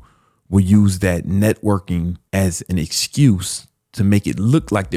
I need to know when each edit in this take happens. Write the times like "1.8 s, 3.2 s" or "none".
none